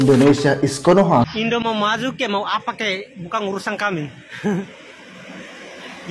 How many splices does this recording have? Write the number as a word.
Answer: one